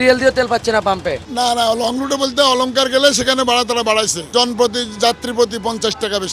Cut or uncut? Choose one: cut